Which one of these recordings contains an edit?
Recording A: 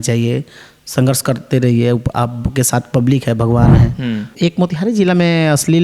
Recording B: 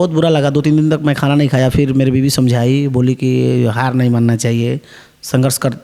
A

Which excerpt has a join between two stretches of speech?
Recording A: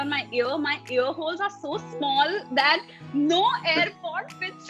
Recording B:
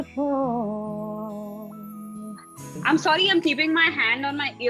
B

